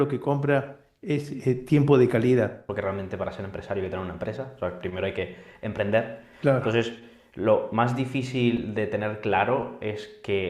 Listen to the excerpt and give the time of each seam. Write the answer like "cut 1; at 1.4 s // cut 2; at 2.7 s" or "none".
cut 1; at 2.6 s